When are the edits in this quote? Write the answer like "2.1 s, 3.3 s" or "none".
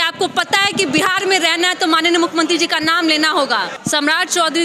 3.8 s